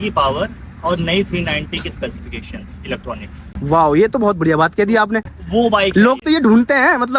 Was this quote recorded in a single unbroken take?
yes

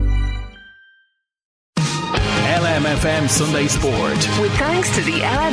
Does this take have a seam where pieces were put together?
yes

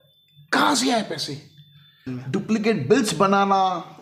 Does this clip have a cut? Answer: yes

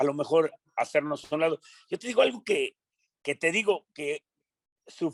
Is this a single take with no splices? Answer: yes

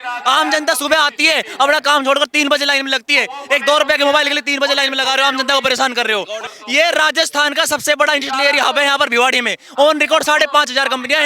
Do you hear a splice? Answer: yes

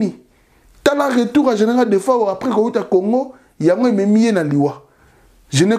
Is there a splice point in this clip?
no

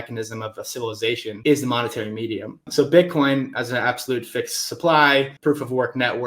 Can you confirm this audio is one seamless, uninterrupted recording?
no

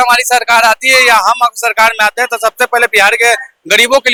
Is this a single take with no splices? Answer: yes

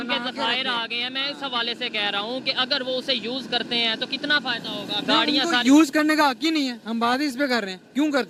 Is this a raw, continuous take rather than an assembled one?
yes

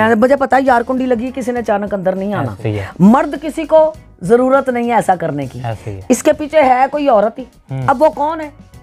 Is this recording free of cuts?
no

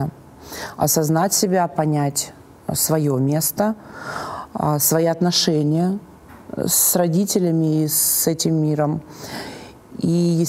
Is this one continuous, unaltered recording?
yes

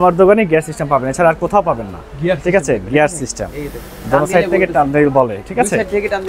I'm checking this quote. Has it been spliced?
no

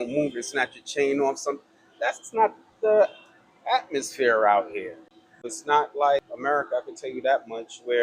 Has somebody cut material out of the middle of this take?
yes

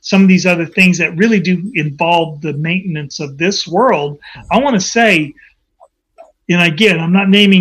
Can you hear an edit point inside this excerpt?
no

